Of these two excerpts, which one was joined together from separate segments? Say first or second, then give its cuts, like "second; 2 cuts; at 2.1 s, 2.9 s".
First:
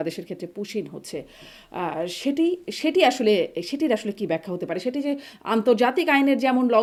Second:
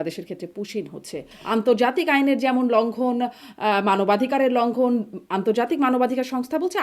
second; 1 cut; at 1.3 s